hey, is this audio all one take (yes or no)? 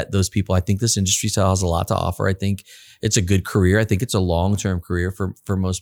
yes